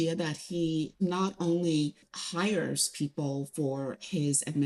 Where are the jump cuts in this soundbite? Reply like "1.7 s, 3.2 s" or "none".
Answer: 0.9 s, 2.1 s